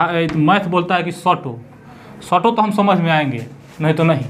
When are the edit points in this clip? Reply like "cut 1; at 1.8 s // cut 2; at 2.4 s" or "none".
none